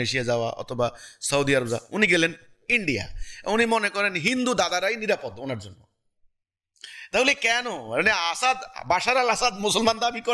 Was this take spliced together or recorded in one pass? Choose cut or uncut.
uncut